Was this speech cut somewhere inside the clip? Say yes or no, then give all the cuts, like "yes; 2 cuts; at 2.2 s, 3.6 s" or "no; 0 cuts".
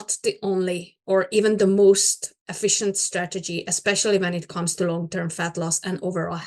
no; 0 cuts